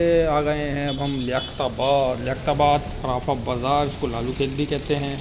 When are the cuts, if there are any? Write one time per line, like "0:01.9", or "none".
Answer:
none